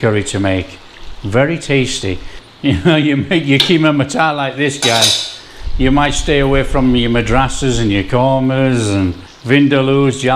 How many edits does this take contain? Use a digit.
2